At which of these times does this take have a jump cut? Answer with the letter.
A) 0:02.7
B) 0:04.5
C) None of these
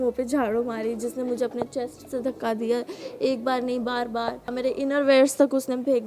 B